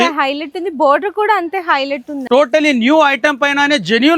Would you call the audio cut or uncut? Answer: cut